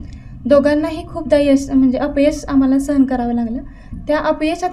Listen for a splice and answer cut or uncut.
uncut